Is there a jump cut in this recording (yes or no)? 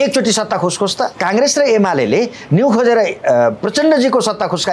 yes